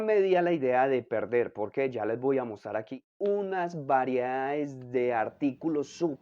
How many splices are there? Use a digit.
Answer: 1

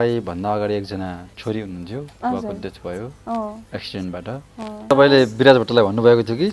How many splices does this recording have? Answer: 1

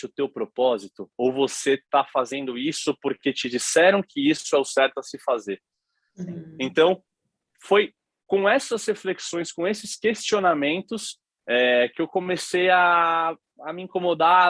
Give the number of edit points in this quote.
0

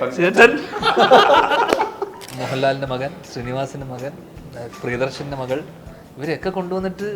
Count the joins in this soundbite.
1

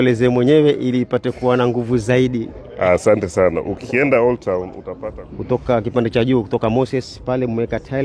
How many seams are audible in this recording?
1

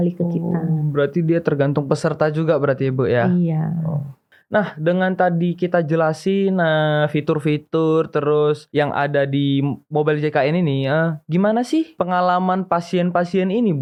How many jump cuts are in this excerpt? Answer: 0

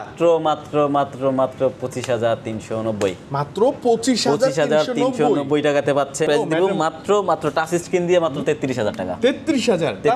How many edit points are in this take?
1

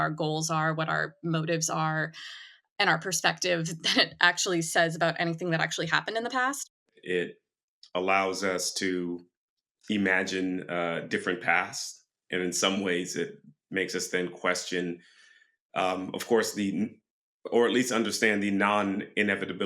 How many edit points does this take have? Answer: 1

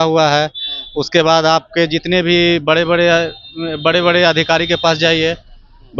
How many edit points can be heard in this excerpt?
0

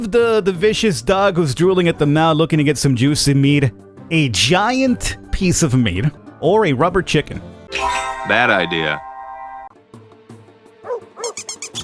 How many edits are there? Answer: 2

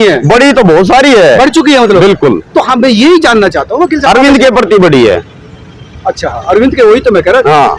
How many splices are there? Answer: 0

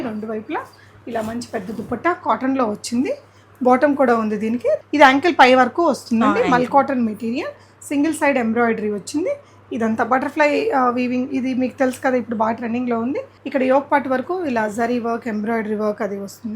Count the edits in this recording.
2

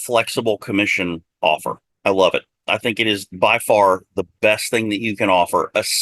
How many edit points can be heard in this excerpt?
1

